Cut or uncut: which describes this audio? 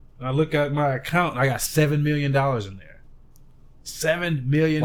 uncut